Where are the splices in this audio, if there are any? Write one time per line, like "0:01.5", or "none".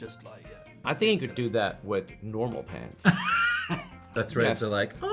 0:00.8
0:04.1